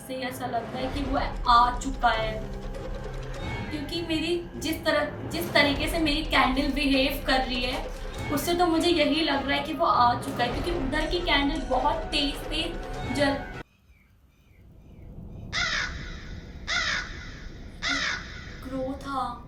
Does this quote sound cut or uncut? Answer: uncut